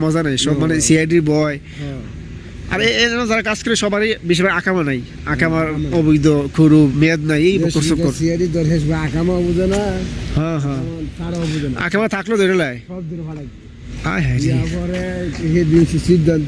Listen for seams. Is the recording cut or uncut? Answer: uncut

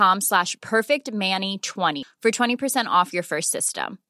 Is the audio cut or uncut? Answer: cut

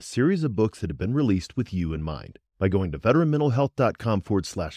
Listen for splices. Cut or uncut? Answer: uncut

